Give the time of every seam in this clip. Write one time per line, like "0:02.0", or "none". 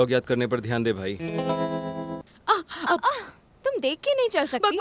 0:02.2